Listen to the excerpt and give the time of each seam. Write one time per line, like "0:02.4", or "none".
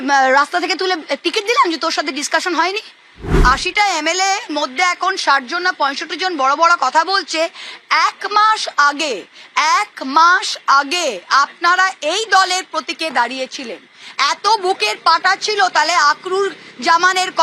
0:03.2